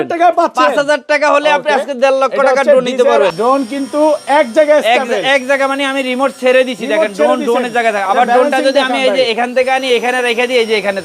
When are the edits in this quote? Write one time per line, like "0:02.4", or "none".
0:03.3